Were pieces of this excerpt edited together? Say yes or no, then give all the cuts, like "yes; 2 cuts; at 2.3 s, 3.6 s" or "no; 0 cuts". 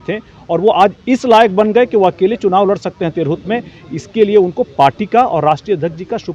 no; 0 cuts